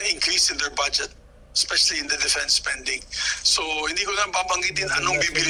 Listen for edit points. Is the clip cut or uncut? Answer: uncut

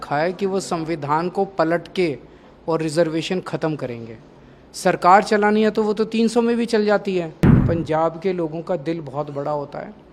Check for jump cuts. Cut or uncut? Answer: cut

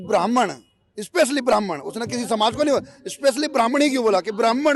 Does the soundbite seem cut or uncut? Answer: uncut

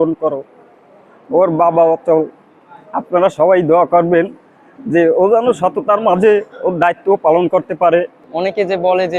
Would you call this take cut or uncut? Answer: cut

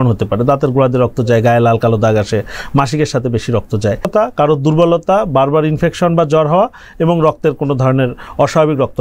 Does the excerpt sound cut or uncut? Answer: cut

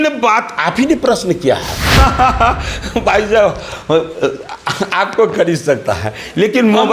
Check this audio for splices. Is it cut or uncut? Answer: cut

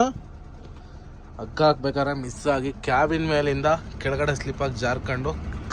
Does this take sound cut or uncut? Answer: uncut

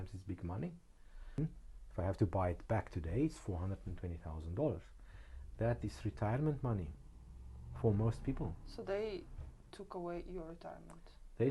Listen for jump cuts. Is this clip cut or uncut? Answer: cut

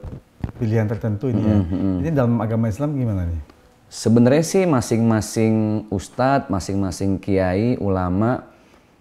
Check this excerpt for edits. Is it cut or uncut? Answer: uncut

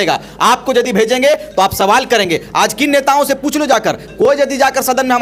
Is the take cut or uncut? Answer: uncut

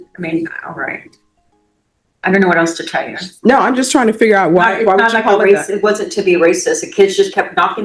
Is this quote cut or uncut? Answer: uncut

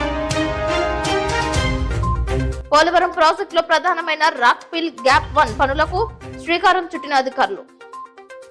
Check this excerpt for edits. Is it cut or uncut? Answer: cut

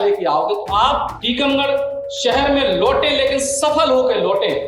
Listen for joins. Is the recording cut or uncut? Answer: cut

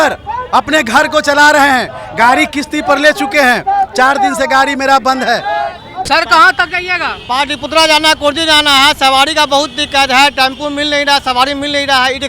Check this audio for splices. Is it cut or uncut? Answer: cut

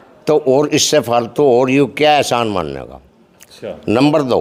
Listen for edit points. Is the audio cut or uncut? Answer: uncut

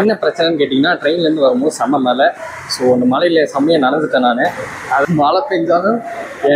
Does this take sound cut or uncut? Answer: cut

